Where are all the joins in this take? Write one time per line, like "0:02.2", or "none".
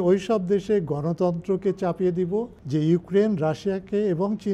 0:02.6